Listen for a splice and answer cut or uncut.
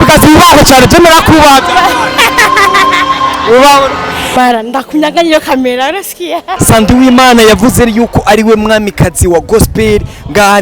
cut